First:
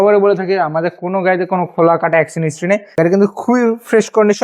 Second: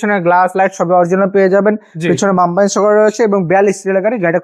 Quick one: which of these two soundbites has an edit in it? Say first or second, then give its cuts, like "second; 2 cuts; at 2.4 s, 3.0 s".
first; 1 cut; at 2.9 s